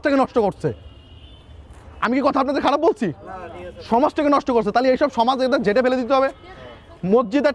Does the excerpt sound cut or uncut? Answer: uncut